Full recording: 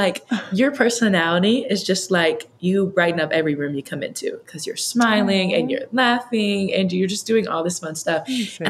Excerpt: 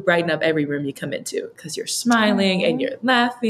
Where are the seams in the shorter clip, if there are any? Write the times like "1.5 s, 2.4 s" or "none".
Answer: none